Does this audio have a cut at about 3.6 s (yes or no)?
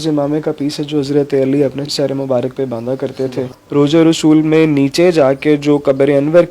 yes